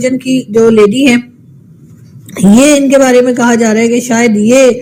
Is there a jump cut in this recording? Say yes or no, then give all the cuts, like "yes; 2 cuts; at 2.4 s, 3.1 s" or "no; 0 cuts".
no; 0 cuts